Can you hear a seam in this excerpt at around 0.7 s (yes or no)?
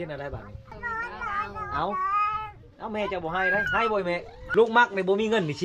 yes